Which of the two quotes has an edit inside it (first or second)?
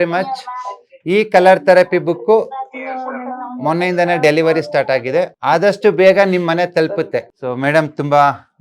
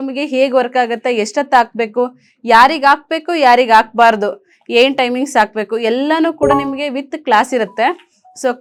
first